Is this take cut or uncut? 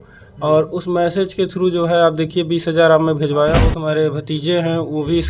cut